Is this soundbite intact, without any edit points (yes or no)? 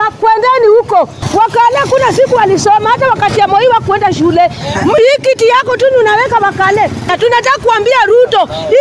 no